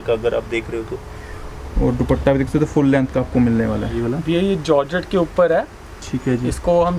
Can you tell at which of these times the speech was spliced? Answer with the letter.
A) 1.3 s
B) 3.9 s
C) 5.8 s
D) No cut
B